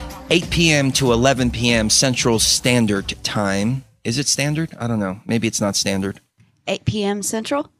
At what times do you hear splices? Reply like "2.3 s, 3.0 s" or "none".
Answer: none